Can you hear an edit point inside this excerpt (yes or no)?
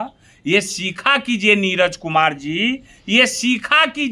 no